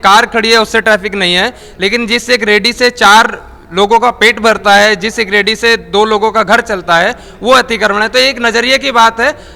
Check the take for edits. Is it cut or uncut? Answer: uncut